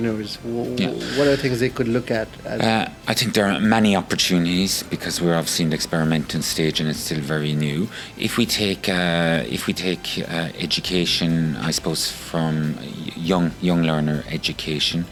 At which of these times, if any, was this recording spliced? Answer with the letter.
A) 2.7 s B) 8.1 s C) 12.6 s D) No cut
D